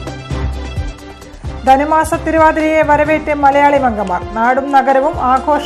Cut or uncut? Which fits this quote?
cut